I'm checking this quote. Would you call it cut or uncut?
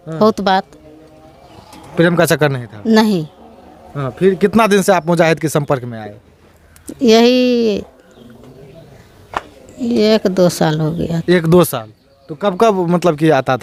uncut